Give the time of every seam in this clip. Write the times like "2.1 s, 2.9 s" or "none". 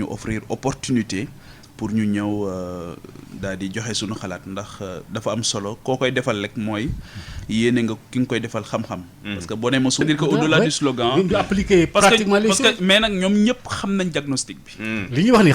10.0 s